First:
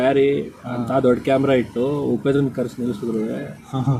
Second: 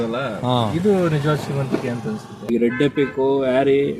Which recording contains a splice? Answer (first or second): second